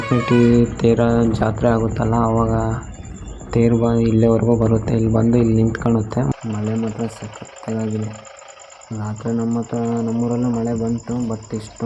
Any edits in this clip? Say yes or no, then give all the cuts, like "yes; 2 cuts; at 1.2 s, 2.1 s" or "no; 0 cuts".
yes; 1 cut; at 6.3 s